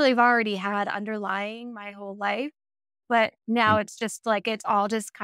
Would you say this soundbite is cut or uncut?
uncut